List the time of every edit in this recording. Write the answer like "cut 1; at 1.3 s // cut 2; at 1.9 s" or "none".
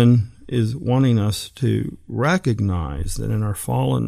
none